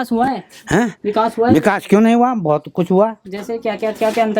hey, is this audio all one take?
yes; 0 cuts

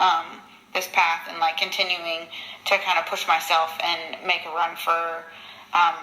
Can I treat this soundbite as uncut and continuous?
yes; 0 cuts

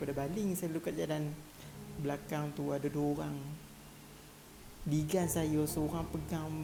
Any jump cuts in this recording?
no; 0 cuts

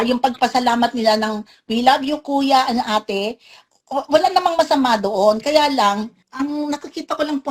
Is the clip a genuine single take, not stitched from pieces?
yes; 0 cuts

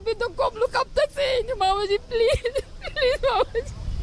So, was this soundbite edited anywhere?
no; 0 cuts

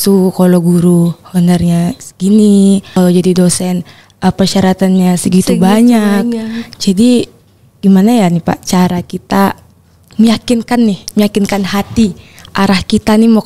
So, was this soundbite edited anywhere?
yes; 1 cut; at 2.9 s

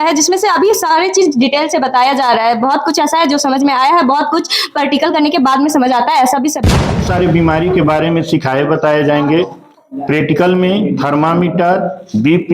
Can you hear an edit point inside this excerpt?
yes; 1 cut; at 6.9 s

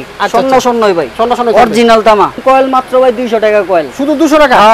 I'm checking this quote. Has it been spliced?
yes; 1 cut; at 2.4 s

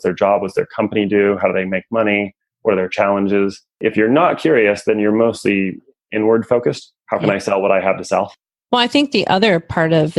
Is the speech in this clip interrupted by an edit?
yes; 2 cuts; at 6.9 s, 8.5 s

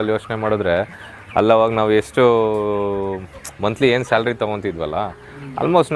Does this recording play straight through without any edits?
yes; 0 cuts

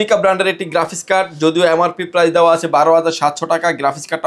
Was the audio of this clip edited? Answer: no; 0 cuts

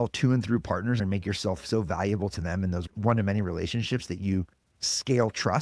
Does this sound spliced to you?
yes; 2 cuts; at 1.0 s, 2.9 s

